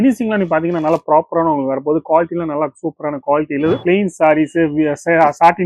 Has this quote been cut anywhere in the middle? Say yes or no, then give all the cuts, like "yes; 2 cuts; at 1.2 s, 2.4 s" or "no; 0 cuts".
yes; 1 cut; at 3.8 s